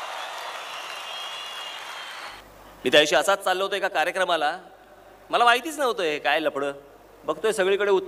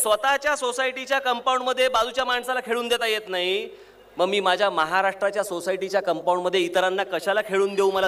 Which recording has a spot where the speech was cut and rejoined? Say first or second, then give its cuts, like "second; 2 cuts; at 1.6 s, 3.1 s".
first; 1 cut; at 2.4 s